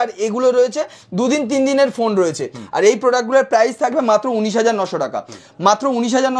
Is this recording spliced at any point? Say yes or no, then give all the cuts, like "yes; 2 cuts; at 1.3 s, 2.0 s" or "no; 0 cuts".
no; 0 cuts